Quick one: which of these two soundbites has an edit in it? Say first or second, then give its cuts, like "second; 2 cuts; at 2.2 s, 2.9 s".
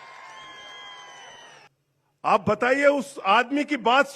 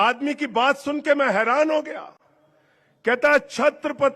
first; 1 cut; at 1.7 s